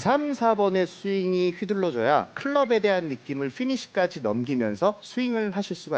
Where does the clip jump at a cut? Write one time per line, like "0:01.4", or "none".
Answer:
0:02.3
0:05.0